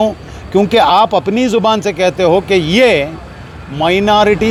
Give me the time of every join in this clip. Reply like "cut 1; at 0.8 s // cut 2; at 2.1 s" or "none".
none